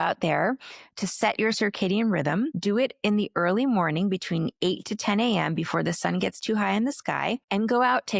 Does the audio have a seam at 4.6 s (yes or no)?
no